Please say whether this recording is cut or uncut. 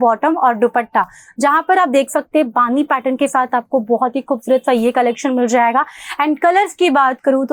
uncut